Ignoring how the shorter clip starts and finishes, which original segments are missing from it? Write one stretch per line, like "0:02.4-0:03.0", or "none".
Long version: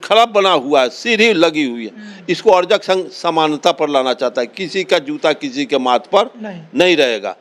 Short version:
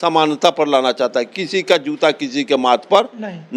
none